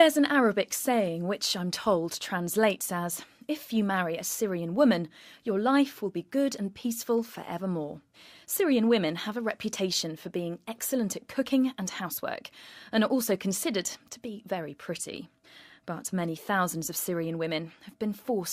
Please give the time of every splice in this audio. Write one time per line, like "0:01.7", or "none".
0:01.3